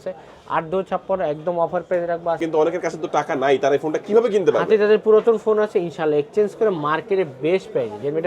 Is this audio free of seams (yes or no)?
no